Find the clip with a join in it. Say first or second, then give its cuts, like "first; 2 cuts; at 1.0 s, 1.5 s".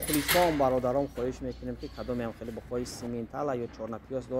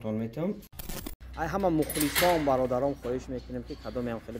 second; 1 cut; at 0.9 s